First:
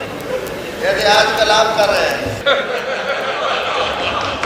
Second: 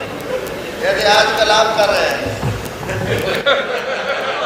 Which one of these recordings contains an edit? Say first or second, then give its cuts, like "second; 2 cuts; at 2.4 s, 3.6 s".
first; 1 cut; at 2.4 s